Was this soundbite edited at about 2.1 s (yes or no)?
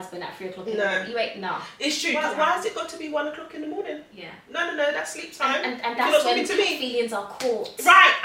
yes